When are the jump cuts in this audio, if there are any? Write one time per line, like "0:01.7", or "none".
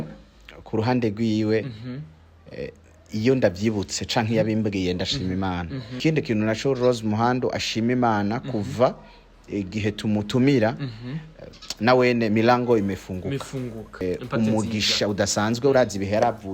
0:05.9
0:14.0